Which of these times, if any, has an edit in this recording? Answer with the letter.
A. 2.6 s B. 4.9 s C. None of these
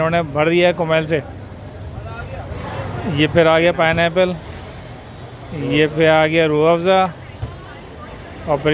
A